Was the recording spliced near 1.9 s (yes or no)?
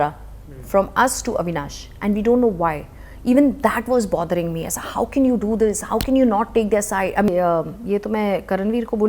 no